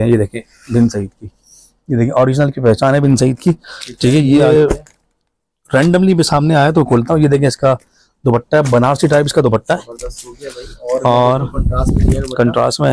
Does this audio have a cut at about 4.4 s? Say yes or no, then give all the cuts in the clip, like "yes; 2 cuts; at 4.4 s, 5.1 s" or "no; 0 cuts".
yes; 1 cut; at 4.4 s